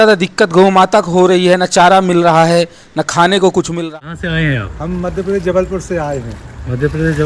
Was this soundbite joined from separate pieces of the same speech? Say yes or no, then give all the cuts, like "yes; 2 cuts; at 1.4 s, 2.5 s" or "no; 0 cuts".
yes; 1 cut; at 3.7 s